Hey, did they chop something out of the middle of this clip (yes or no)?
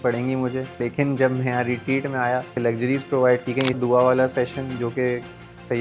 yes